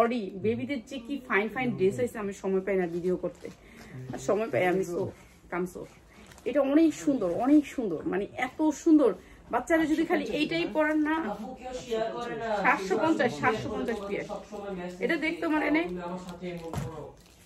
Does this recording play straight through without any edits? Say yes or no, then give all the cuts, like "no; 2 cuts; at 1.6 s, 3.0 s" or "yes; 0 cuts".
yes; 0 cuts